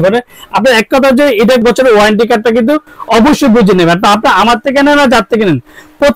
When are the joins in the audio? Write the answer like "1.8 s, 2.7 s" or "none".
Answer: 1.4 s